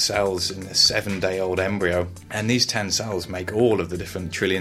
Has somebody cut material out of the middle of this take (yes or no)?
yes